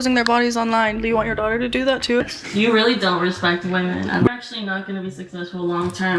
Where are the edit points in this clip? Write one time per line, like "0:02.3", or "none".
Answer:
0:02.3
0:04.3